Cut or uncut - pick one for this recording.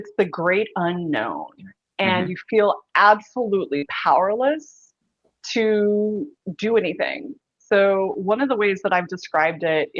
uncut